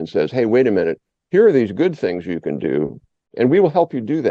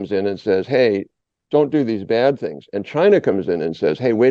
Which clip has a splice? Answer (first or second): first